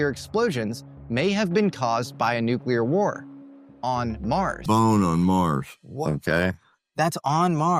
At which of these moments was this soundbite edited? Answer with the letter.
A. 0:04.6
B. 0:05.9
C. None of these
A